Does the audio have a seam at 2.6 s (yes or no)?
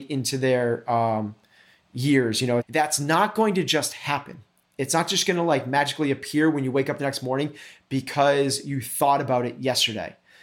yes